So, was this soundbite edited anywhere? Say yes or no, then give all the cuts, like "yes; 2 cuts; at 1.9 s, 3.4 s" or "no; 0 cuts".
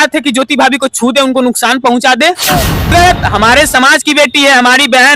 yes; 1 cut; at 2.9 s